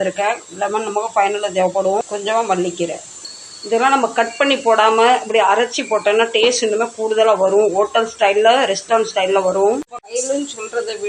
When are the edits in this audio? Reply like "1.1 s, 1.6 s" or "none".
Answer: none